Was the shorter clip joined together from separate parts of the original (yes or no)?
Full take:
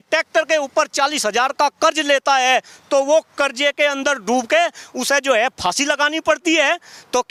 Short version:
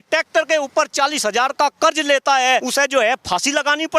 yes